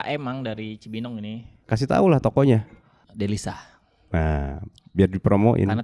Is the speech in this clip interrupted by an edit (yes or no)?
no